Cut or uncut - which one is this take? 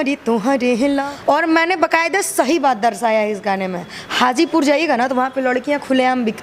cut